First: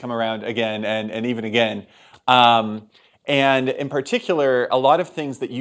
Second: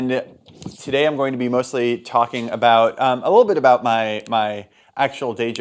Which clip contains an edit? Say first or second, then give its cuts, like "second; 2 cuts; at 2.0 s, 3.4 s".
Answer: first; 1 cut; at 4.5 s